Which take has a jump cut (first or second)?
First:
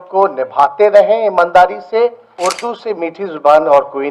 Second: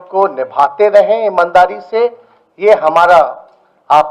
first